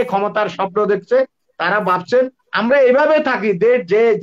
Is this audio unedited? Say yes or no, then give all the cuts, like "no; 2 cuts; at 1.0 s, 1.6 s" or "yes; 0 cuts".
yes; 0 cuts